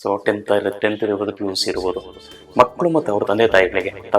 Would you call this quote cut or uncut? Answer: uncut